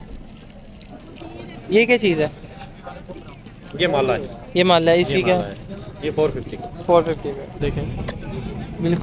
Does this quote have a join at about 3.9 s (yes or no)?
no